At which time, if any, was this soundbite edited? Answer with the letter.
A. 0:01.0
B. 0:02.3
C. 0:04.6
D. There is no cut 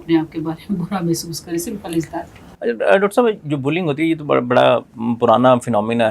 D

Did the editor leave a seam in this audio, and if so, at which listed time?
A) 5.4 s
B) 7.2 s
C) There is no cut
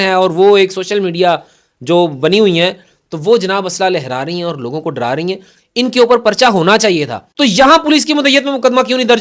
B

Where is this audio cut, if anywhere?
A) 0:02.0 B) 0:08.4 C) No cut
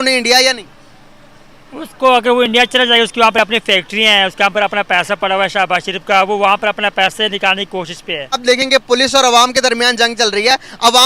B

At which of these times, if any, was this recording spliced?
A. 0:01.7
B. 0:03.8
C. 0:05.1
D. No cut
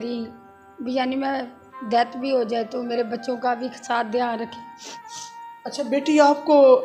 C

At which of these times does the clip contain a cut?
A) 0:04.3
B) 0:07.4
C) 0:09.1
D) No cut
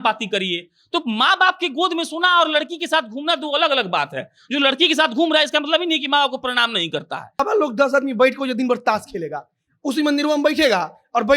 B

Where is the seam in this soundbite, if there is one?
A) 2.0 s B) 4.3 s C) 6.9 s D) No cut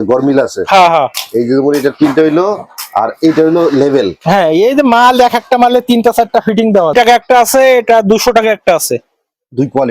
C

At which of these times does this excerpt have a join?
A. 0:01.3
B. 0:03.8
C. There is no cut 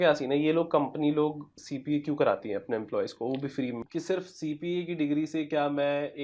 B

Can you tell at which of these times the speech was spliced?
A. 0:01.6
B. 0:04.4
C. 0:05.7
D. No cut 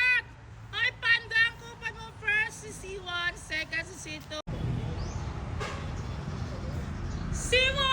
B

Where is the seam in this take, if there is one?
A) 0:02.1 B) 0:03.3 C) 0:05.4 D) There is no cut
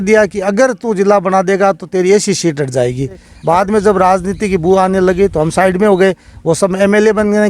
B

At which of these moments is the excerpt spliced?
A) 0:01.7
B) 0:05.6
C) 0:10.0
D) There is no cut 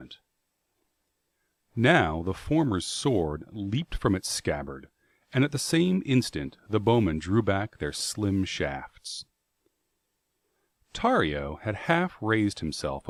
D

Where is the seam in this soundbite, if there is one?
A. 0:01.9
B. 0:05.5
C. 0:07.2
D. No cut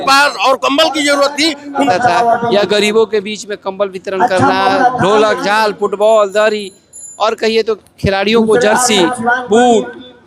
A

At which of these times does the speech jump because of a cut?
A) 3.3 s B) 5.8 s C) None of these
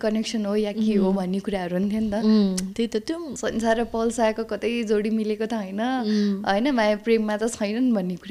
A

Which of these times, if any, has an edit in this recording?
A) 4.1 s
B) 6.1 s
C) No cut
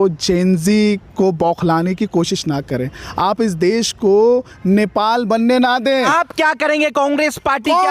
B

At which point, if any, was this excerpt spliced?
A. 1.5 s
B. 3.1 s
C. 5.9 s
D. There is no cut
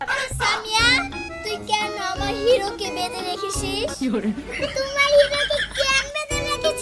D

